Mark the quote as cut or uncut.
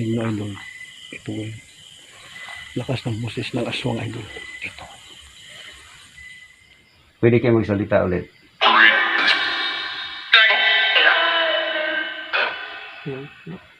cut